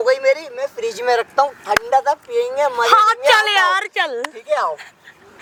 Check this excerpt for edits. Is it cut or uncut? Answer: uncut